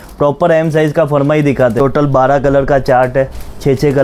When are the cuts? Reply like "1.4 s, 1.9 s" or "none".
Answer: 1.8 s